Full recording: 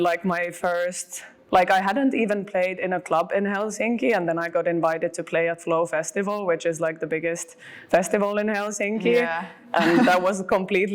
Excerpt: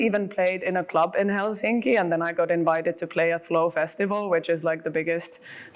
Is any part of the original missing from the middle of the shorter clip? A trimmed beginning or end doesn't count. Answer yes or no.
no